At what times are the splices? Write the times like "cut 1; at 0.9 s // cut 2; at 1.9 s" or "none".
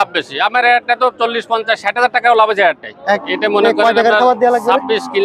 cut 1; at 3.2 s